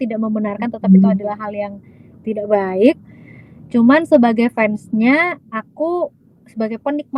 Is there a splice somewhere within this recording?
no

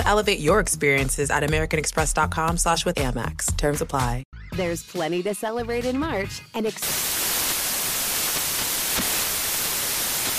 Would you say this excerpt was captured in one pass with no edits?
no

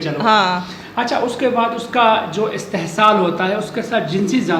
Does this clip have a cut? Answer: no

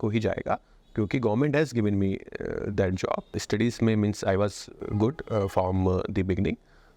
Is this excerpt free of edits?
no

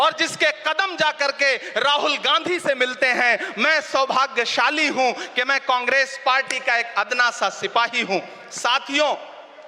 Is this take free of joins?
yes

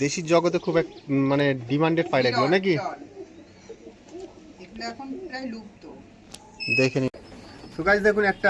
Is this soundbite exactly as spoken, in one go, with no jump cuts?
no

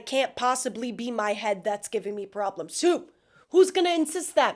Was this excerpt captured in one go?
yes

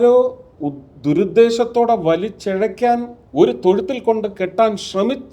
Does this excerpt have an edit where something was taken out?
yes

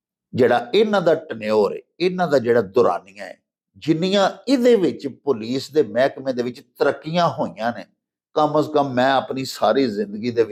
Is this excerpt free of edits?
yes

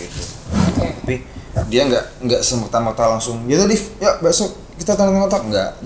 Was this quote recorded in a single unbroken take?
yes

